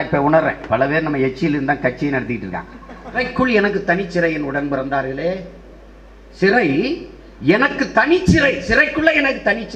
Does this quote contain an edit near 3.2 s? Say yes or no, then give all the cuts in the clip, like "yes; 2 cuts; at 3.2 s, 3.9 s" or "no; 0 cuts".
yes; 1 cut; at 3.2 s